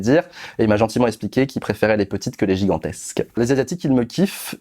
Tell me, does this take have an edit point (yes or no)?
yes